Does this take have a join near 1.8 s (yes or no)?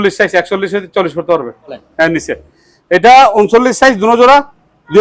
yes